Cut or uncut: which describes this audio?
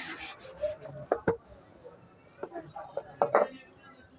uncut